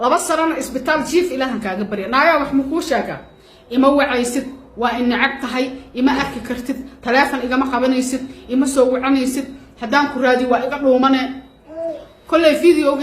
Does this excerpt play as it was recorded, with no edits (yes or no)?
yes